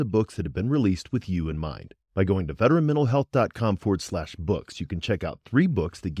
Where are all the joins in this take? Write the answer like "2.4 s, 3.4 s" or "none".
none